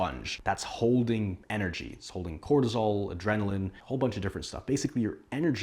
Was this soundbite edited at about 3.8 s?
yes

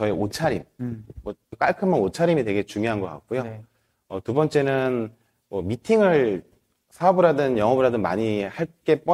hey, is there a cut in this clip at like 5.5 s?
no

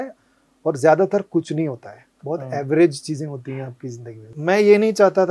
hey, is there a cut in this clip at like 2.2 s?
no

